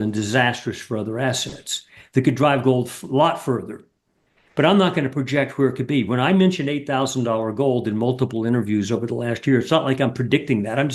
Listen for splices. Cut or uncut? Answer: uncut